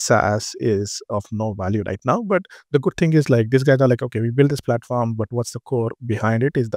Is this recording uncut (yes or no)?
yes